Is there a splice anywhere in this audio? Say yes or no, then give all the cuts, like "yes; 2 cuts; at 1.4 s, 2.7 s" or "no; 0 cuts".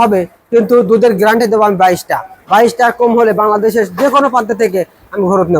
no; 0 cuts